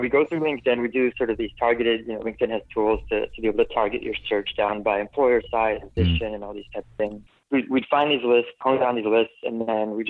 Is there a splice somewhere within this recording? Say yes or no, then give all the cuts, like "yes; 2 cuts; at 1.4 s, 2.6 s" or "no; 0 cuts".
yes; 3 cuts; at 6.0 s, 7.3 s, 8.6 s